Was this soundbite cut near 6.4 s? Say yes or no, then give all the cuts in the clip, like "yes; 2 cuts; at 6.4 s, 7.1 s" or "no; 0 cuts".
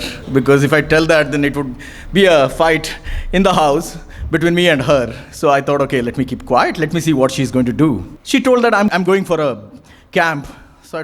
no; 2 cuts; at 8.1 s, 8.9 s